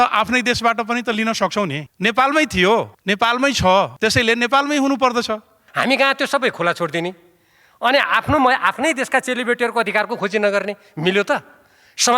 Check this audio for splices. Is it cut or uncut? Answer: cut